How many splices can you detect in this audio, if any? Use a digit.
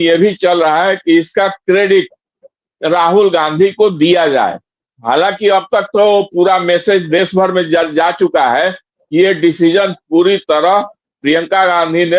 0